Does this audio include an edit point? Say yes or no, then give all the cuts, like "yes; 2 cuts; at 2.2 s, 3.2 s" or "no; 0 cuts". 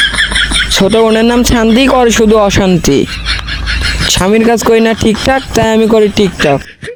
no; 0 cuts